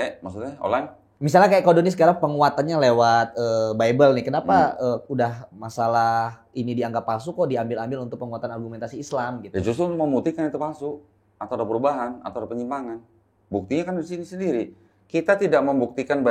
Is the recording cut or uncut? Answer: uncut